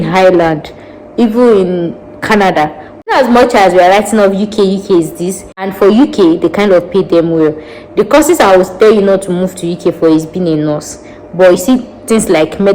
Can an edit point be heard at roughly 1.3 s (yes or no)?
no